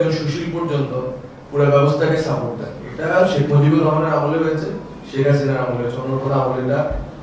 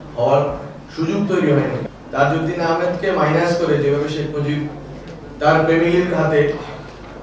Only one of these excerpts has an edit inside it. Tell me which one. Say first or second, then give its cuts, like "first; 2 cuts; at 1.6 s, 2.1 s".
second; 1 cut; at 1.8 s